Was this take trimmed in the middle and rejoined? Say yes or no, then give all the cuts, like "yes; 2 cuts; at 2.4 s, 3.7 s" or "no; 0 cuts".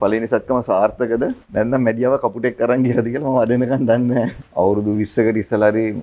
yes; 2 cuts; at 1.4 s, 4.4 s